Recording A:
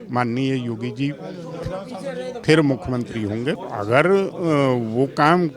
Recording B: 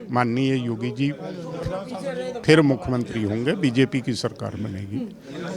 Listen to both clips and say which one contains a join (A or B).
A